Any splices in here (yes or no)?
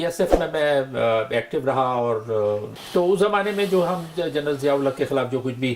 yes